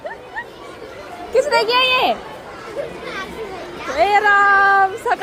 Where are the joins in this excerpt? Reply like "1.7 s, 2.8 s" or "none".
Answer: none